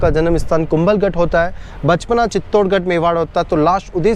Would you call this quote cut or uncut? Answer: uncut